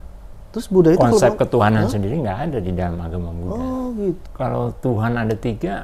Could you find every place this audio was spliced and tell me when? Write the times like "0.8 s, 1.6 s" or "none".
4.2 s